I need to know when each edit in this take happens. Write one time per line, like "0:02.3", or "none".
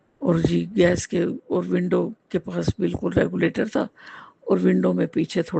none